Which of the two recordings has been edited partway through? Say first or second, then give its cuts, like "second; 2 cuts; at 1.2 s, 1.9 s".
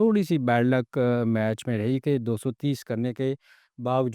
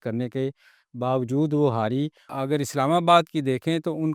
second; 1 cut; at 2.3 s